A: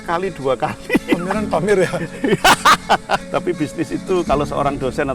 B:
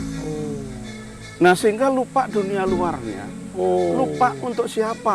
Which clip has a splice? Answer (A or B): A